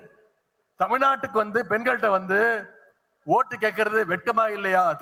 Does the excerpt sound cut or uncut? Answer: uncut